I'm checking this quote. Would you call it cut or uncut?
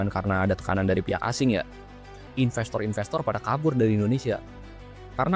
cut